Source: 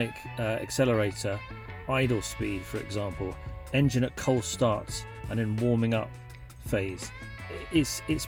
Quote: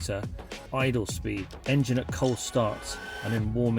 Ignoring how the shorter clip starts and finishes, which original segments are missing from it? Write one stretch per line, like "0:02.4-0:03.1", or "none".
0:02.7-0:03.6